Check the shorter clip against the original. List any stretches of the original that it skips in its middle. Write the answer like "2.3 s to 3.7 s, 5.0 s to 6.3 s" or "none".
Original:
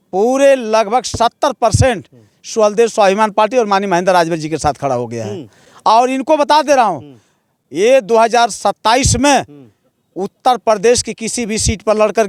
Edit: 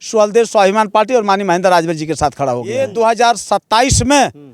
5.2 s to 7.9 s